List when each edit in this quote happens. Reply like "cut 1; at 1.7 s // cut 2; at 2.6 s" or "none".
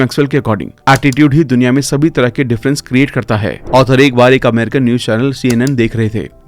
cut 1; at 3.6 s